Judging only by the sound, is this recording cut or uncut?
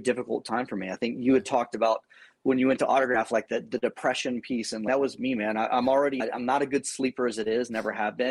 cut